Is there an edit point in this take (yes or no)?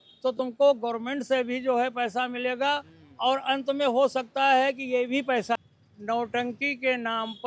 yes